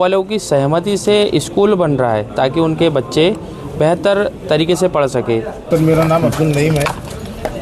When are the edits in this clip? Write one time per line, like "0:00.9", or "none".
0:05.6